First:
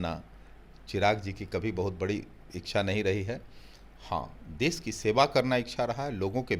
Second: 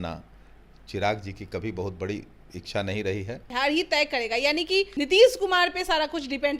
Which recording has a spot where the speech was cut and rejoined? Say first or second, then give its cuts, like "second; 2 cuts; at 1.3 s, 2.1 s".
second; 2 cuts; at 3.5 s, 4.9 s